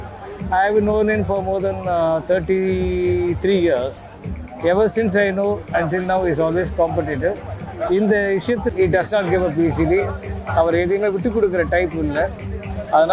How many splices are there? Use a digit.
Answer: 1